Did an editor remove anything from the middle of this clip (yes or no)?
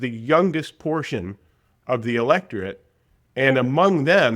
no